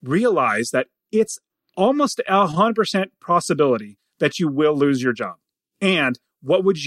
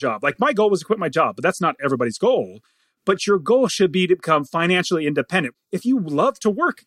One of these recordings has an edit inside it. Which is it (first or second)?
second